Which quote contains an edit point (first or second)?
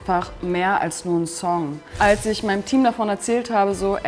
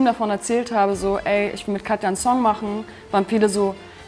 first